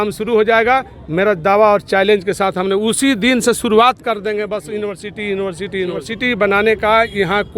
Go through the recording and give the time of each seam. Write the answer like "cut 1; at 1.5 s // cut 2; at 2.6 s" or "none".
cut 1; at 6.1 s